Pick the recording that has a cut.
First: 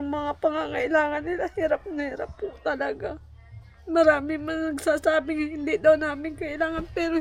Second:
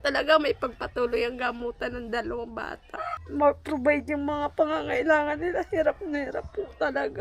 second; 1 cut; at 3.2 s

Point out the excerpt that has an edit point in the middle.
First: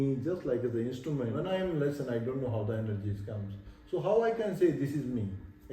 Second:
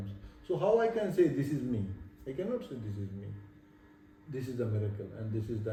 first; 1 cut; at 1.4 s

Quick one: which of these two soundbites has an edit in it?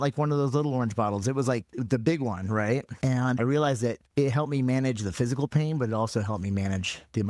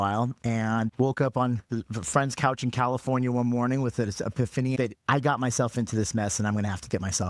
second; 1 cut; at 4.8 s

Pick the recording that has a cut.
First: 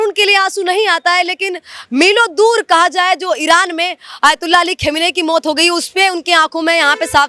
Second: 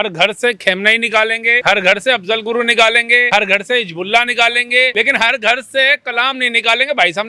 second; 3 cuts; at 1.6 s, 3.2 s, 4.9 s

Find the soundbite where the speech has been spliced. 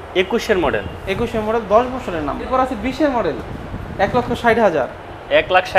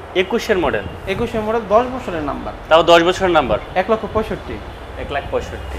first; 1 cut; at 2.5 s

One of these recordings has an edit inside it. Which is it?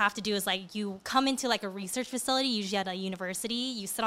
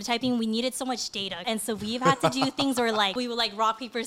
second; 2 cuts; at 1.4 s, 3.2 s

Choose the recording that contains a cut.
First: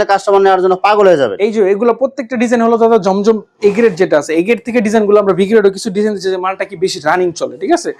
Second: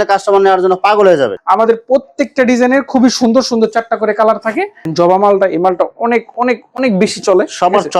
second; 2 cuts; at 1.3 s, 4.8 s

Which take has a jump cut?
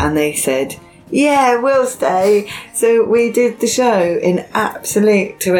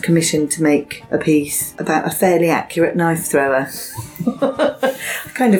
second; 2 cuts; at 1.0 s, 1.8 s

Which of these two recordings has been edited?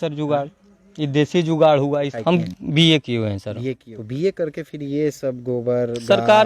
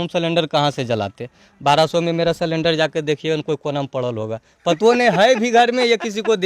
first; 2 cuts; at 2.1 s, 3.9 s

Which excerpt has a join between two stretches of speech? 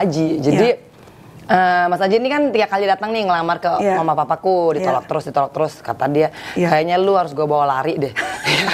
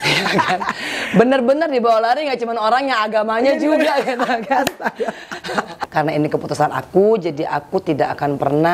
second; 1 cut; at 5.7 s

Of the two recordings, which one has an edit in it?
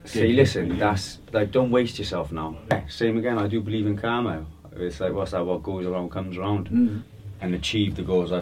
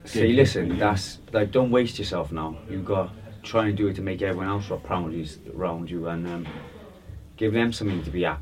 first; 2 cuts; at 2.7 s, 7.1 s

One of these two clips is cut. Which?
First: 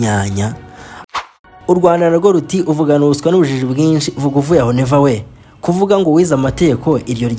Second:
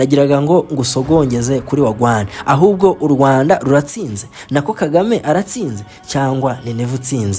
first; 1 cut; at 1.0 s

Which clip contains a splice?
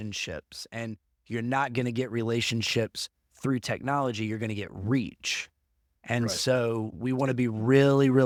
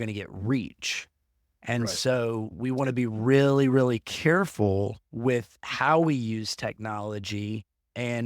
second; 1 cut; at 5.0 s

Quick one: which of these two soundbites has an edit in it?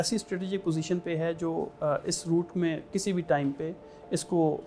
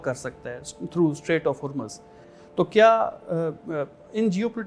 second; 1 cut; at 2.2 s

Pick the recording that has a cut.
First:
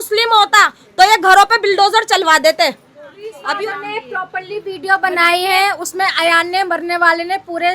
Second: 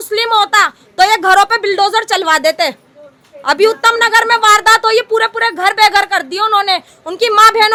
first; 1 cut; at 3.4 s

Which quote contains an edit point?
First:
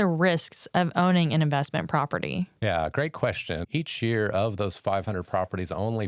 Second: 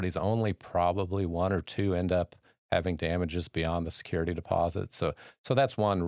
first; 1 cut; at 3.6 s

